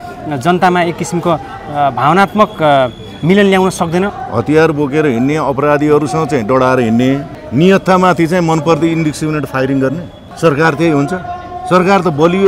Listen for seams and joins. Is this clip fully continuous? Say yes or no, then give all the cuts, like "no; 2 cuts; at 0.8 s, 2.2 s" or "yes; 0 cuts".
no; 3 cuts; at 4.2 s, 7.4 s, 10.2 s